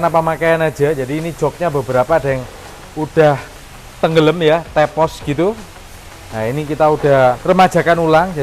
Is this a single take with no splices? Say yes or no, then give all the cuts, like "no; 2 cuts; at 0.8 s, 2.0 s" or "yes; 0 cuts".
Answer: yes; 0 cuts